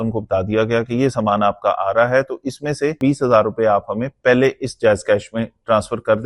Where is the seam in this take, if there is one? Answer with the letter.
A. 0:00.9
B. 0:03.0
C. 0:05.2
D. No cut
B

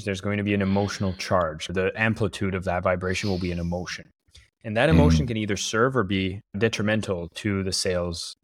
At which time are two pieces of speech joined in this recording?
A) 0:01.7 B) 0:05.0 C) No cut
A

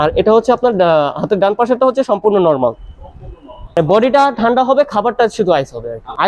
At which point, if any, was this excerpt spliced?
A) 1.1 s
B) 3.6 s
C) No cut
B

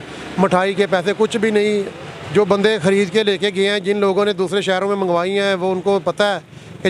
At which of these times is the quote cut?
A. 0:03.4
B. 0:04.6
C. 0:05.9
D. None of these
D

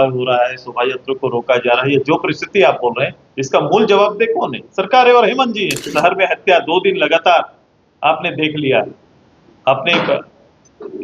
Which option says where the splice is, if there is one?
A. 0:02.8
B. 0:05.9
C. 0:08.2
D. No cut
B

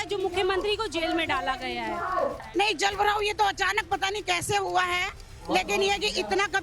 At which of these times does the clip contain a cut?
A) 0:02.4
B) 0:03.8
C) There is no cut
A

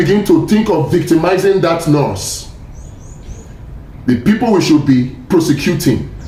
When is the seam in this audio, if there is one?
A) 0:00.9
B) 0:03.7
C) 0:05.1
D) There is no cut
D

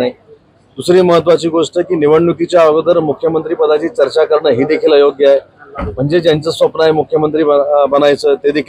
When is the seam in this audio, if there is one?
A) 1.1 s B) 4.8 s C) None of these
C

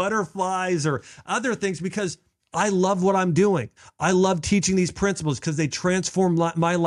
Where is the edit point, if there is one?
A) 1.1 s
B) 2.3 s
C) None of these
C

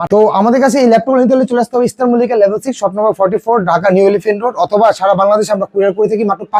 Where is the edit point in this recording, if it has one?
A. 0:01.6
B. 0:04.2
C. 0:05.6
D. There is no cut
D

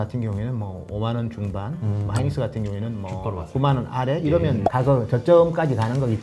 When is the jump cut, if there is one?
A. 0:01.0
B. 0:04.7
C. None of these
B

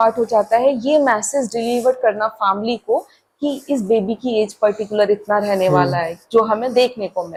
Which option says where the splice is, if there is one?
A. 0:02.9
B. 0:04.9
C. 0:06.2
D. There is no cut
D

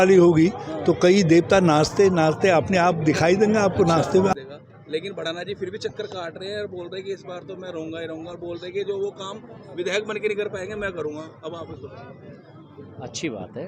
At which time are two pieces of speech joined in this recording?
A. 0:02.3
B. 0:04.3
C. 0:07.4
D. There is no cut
B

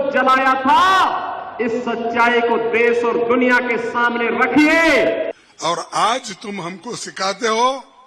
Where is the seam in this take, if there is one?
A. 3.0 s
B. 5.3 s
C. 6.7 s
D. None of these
B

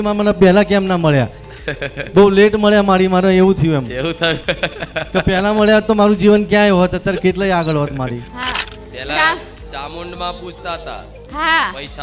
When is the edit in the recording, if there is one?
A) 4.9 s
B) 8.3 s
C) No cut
B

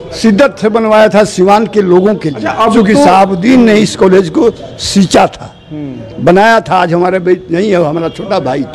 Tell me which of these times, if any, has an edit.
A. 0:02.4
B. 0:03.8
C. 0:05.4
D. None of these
A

